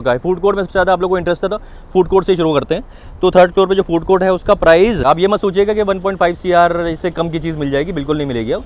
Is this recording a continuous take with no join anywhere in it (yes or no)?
no